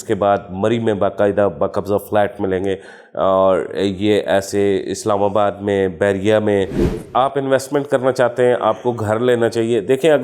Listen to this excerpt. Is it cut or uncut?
cut